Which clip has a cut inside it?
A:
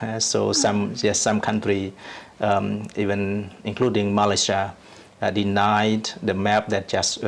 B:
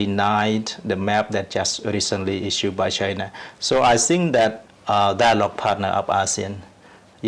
B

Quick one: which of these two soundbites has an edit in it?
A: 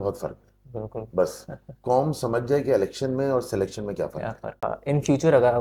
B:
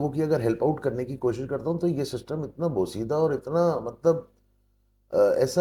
A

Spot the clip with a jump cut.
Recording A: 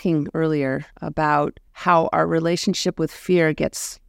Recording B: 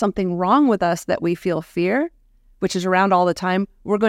A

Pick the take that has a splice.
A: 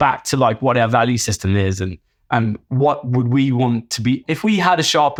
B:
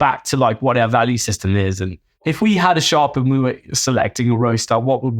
B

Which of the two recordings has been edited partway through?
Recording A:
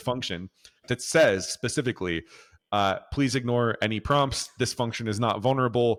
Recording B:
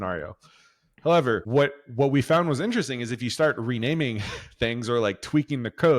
B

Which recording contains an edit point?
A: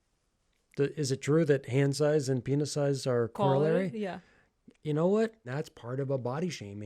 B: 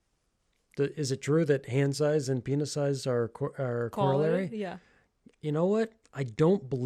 A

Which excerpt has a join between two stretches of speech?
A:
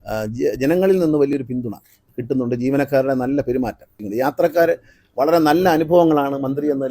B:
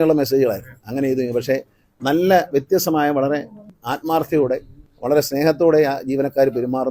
A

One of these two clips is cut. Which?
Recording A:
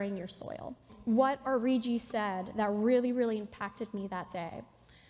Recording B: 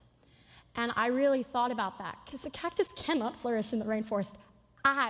A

